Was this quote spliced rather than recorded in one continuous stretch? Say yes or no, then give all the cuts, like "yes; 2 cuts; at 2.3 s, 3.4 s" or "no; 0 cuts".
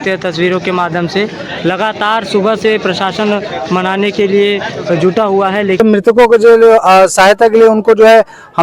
yes; 1 cut; at 5.8 s